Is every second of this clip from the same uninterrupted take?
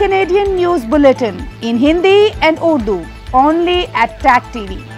yes; 0 cuts

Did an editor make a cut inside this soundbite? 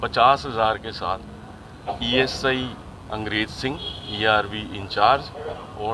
no; 0 cuts

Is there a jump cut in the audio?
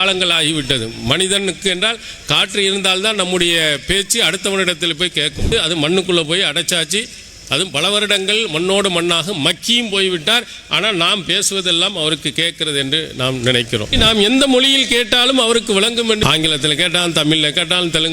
yes; 3 cuts; at 5.5 s, 13.9 s, 16.2 s

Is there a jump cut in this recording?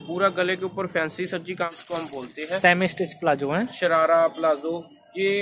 yes; 1 cut; at 1.6 s

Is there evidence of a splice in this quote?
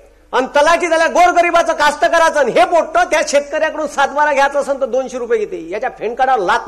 no; 0 cuts

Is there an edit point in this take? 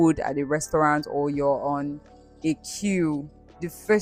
no; 0 cuts

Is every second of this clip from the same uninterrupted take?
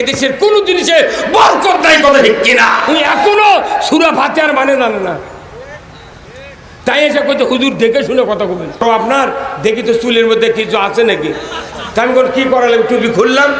no; 2 cuts; at 2.9 s, 8.8 s

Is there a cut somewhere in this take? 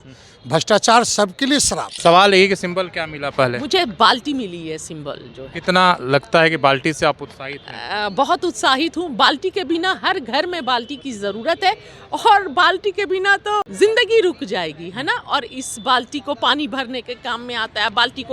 yes; 2 cuts; at 1.8 s, 13.7 s

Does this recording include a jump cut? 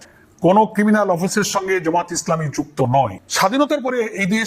yes; 1 cut; at 3.2 s

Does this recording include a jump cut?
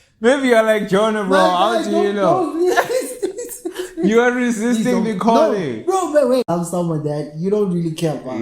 yes; 1 cut; at 6.5 s

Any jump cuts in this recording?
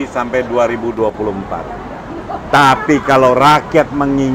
no; 0 cuts

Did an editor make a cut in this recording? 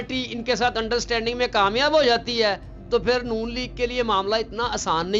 no; 0 cuts

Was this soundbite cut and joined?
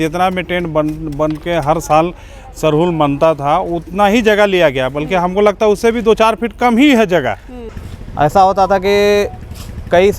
yes; 1 cut; at 8.0 s

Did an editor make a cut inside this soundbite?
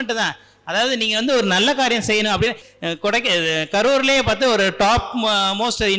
no; 0 cuts

